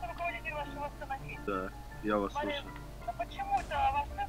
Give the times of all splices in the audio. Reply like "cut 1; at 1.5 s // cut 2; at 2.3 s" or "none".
cut 1; at 1.3 s // cut 2; at 3.0 s